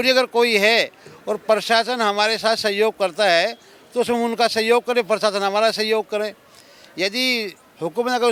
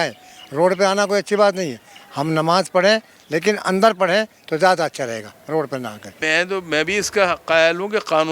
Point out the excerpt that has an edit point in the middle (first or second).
second